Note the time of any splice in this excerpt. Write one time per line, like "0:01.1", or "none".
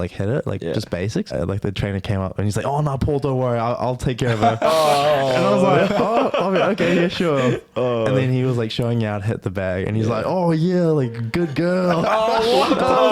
0:01.3